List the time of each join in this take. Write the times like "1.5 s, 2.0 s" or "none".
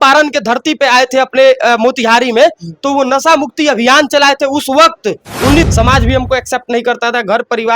5.7 s